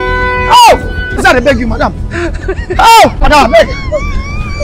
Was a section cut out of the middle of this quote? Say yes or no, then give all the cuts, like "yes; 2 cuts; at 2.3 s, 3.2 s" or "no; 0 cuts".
yes; 2 cuts; at 1.2 s, 3.2 s